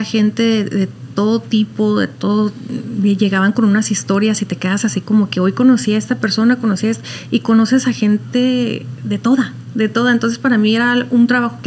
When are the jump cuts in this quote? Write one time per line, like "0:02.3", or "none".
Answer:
none

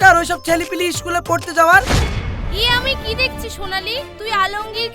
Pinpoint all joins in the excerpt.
0:01.9

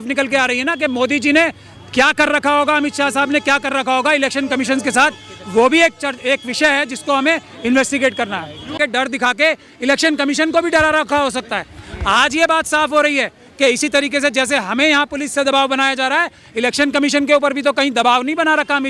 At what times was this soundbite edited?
0:08.8

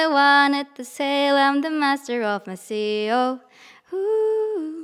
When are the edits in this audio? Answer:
none

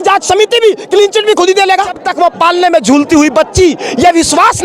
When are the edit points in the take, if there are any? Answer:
0:02.0

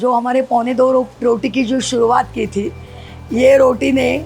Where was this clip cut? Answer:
none

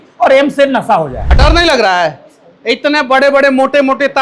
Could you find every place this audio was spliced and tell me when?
0:01.2

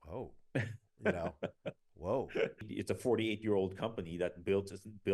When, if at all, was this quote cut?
0:02.7

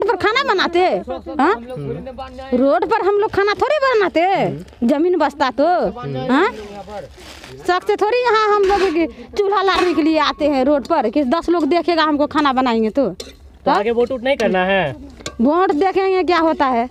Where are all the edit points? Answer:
none

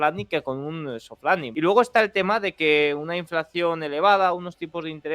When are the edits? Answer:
0:01.5

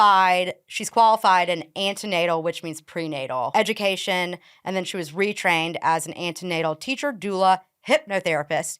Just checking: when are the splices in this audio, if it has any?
0:03.5

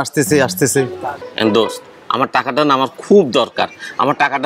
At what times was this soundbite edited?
0:01.2

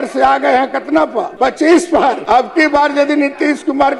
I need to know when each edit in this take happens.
0:01.3
0:02.2

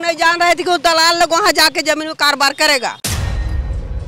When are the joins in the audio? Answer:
0:03.0

